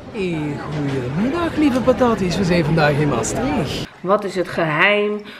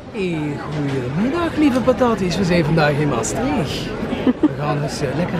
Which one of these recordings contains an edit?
first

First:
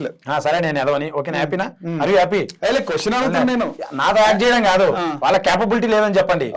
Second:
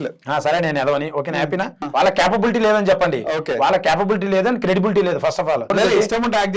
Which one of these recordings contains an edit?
second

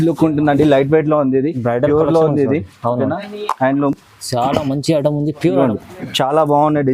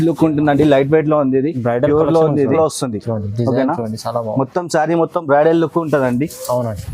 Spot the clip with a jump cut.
second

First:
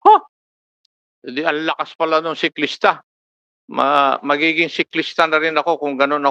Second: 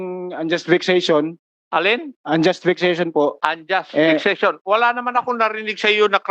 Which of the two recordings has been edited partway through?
second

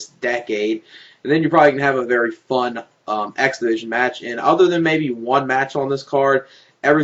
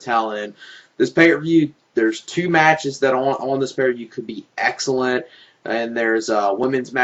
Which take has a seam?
first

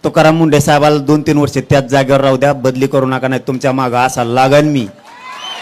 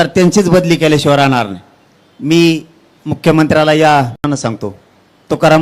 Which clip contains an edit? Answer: second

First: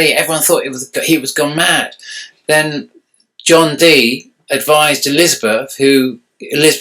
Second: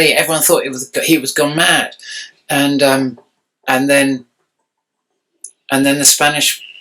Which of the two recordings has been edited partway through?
first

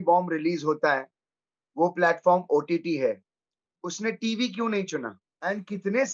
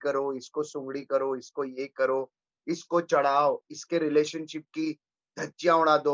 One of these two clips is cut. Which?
first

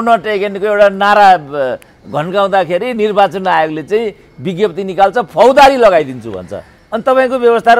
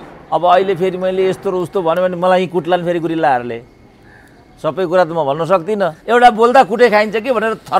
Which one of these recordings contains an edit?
second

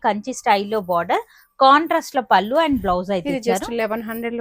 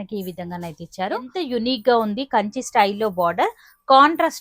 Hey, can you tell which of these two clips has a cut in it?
second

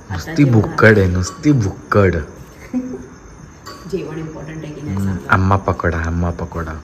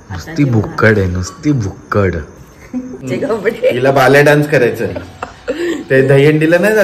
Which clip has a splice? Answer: second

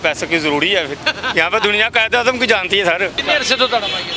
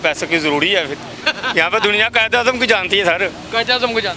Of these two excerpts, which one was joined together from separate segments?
first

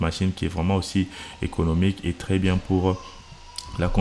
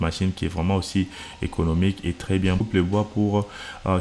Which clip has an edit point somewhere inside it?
second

